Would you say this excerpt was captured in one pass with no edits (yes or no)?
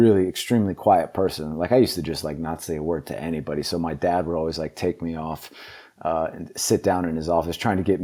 yes